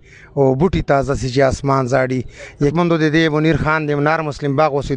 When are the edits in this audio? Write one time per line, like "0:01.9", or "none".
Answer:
0:02.7